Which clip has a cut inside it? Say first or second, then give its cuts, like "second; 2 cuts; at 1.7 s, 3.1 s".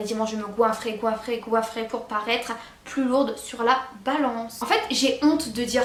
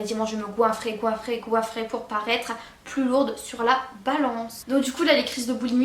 second; 1 cut; at 4.5 s